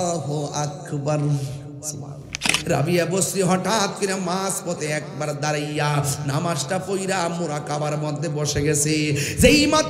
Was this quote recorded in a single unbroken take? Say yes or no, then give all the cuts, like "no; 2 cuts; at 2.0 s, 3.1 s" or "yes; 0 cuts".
no; 1 cut; at 2.5 s